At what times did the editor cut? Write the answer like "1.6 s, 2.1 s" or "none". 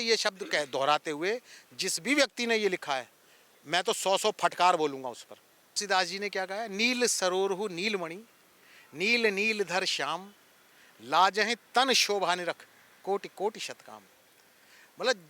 5.8 s